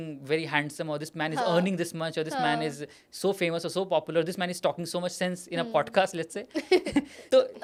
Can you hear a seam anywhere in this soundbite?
no; 0 cuts

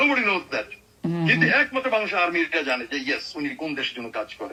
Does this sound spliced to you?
no; 0 cuts

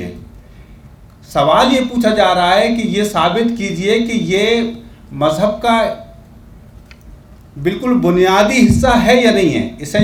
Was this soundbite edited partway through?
no; 0 cuts

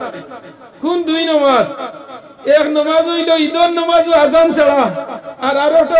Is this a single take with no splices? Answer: yes; 0 cuts

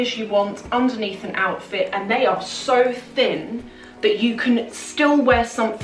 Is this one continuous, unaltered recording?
yes; 0 cuts

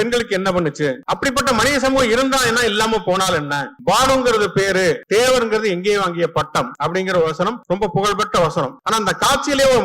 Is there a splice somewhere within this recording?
yes; 6 cuts; at 1.0 s, 3.7 s, 5.0 s, 6.7 s, 7.6 s, 8.8 s

